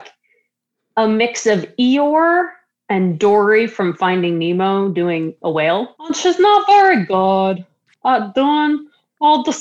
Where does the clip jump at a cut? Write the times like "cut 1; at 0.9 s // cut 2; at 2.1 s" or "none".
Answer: cut 1; at 6.0 s